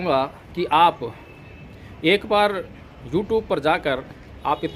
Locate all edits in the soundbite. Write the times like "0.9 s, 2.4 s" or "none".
none